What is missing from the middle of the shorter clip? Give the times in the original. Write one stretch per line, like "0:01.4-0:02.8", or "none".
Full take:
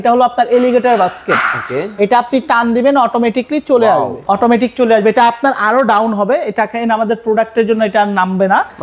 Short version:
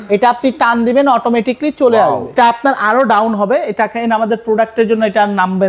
0:04.2-0:05.1